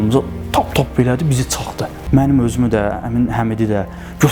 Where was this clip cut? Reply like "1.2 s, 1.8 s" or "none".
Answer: 2.0 s